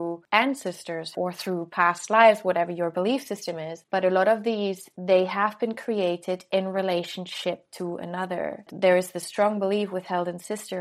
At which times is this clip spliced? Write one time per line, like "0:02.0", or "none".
0:01.1
0:03.8
0:04.9
0:08.7